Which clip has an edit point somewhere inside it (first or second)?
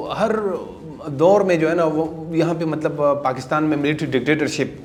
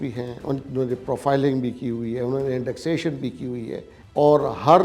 second